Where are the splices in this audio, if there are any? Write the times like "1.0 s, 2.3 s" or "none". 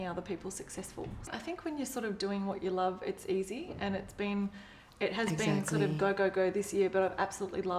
1.3 s